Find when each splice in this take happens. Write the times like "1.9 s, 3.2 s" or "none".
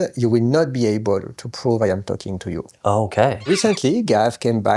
2.7 s, 3.5 s